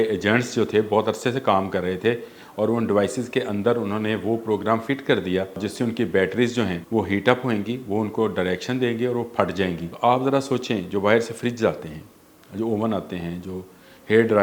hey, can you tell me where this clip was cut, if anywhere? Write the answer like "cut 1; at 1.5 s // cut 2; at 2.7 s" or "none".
cut 1; at 5.6 s // cut 2; at 6.8 s // cut 3; at 9.9 s